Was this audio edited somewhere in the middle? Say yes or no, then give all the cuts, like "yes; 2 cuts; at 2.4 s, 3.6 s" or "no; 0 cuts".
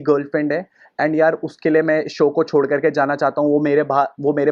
no; 0 cuts